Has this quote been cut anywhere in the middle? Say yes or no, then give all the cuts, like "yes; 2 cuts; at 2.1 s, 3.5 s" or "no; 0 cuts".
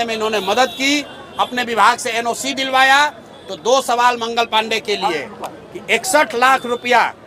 no; 0 cuts